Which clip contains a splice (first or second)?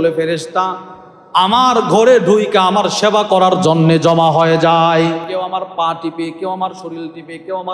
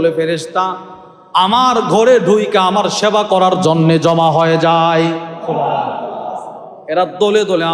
first